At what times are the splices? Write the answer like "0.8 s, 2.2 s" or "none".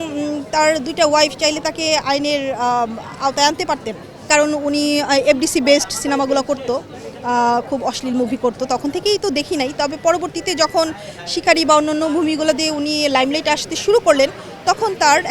4.2 s